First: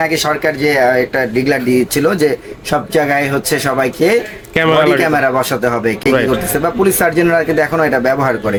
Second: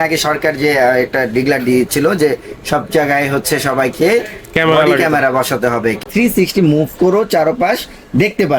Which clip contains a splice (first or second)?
second